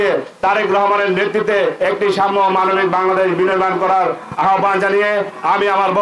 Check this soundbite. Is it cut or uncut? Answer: uncut